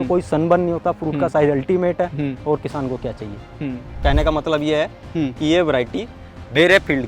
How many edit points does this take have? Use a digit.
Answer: 1